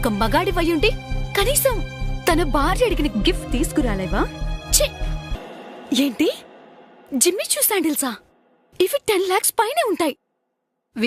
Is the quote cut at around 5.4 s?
yes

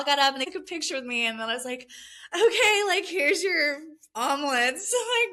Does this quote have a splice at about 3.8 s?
no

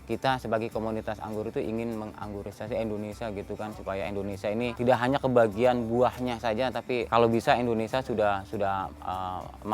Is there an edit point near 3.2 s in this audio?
no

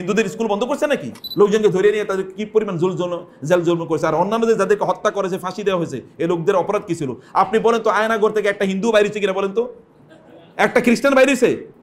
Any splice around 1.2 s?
yes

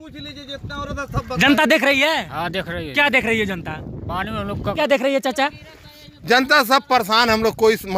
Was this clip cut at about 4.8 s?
yes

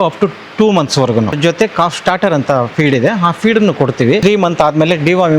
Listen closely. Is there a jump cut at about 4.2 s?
yes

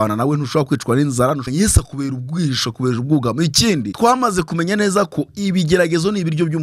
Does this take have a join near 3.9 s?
yes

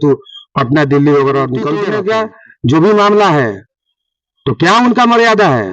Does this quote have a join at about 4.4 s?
no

